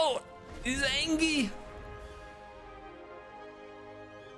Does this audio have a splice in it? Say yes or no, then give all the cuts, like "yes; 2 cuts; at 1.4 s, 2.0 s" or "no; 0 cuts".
no; 0 cuts